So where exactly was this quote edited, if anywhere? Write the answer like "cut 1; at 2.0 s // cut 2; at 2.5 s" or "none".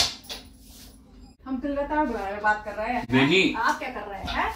cut 1; at 1.3 s // cut 2; at 3.1 s